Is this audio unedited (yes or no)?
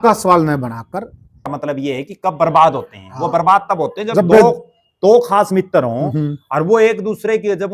no